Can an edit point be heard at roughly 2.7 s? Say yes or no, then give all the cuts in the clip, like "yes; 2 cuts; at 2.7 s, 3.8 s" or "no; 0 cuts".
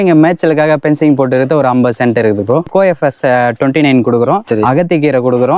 yes; 1 cut; at 2.7 s